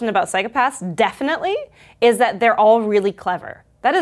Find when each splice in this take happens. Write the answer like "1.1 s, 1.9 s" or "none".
none